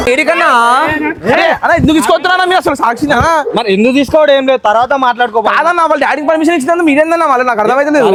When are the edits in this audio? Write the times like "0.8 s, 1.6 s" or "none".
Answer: none